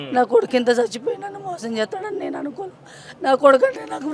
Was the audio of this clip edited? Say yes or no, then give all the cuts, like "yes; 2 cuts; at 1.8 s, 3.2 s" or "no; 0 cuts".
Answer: no; 0 cuts